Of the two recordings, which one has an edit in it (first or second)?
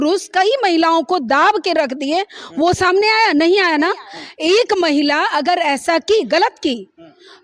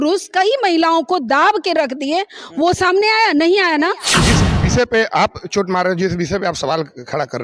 second